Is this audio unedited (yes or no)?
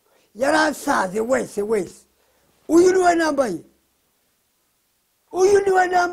yes